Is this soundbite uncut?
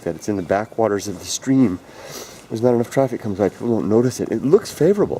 yes; 0 cuts

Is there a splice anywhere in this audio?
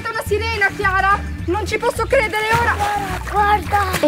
yes; 1 cut; at 3.2 s

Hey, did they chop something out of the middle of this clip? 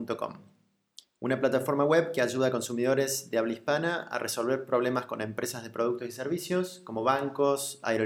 yes; 3 cuts; at 3.2 s, 4.1 s, 6.8 s

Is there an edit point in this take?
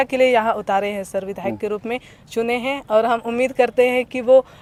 no; 0 cuts

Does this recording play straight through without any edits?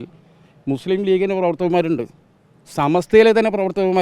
yes; 0 cuts

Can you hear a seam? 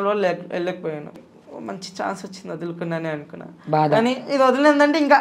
yes; 1 cut; at 1.4 s

